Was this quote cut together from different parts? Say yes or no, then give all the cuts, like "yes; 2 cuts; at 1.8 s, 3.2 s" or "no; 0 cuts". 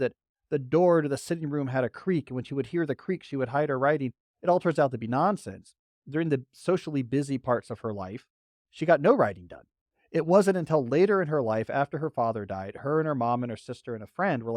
no; 0 cuts